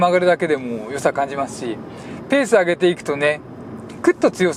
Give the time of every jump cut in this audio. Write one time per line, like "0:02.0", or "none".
none